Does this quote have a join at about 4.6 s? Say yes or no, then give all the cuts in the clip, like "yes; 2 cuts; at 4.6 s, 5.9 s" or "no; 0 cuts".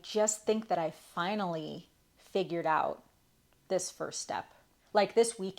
yes; 1 cut; at 4.6 s